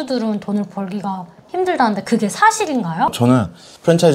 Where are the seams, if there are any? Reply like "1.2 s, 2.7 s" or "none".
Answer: 3.1 s